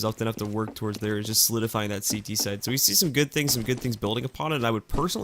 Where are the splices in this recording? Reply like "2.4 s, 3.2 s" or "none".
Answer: 2.3 s